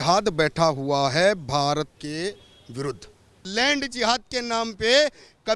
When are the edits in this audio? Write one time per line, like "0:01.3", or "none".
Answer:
0:02.0
0:03.5